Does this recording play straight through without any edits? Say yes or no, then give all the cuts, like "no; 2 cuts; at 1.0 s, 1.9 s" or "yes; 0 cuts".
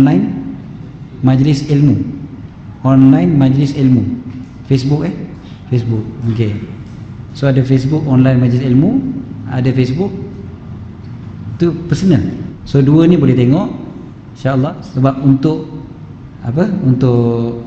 no; 2 cuts; at 12.5 s, 14.7 s